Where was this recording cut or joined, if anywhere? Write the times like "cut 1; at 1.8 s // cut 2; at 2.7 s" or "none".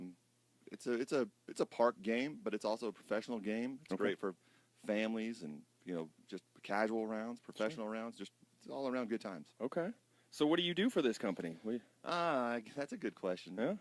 cut 1; at 4.7 s